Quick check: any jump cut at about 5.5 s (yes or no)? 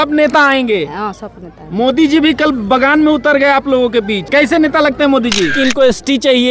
yes